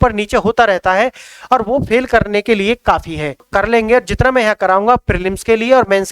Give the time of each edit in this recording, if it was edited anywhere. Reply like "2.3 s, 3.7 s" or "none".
3.4 s